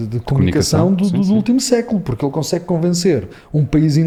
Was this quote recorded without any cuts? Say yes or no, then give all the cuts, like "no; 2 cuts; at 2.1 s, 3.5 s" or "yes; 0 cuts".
yes; 0 cuts